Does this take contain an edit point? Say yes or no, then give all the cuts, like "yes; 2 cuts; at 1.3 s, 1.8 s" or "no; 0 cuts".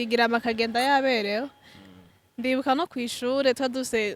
no; 0 cuts